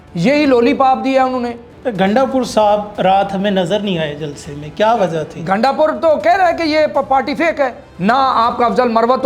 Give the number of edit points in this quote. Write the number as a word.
two